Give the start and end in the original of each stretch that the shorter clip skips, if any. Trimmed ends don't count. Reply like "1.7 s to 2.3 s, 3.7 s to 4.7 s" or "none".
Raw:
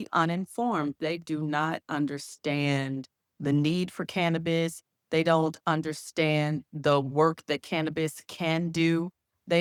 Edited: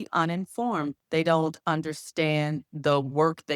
1.0 s to 5.0 s